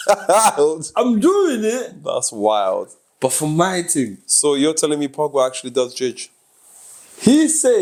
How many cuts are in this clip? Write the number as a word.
zero